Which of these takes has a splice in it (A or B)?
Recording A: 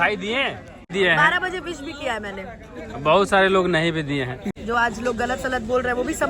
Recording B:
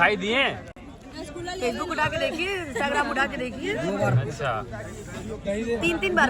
A